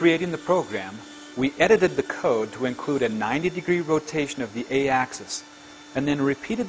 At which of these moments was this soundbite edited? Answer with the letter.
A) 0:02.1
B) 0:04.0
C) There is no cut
C